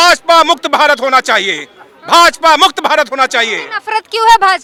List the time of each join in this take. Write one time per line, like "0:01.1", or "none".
none